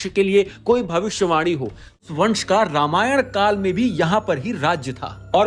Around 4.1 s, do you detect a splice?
no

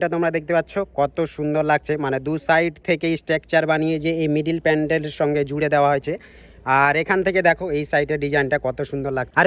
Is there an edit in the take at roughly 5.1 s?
no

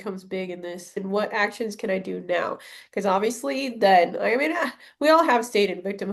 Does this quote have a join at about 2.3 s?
no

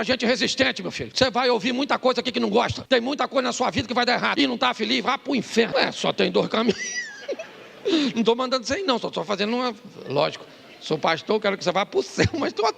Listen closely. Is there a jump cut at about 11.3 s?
no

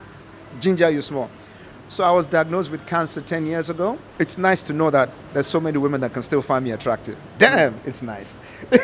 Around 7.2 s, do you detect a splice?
no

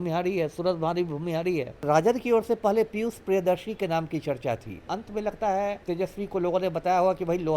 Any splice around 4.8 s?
yes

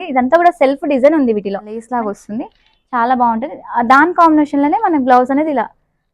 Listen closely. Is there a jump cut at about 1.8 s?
yes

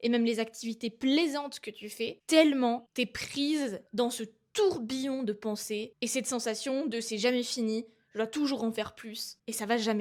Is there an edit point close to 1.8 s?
no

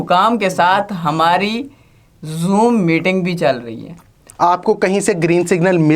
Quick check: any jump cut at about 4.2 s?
yes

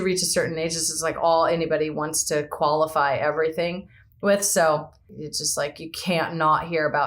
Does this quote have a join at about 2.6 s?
no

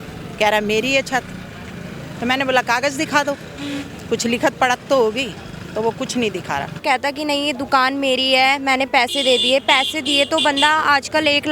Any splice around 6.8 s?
yes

